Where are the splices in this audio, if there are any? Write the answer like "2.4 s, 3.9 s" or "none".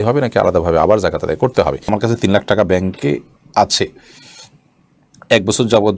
1.9 s